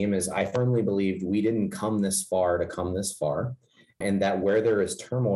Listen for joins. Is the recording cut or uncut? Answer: uncut